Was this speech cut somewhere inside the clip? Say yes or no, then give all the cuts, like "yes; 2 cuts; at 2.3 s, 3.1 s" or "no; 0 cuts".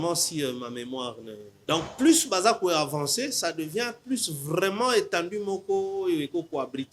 yes; 1 cut; at 1.4 s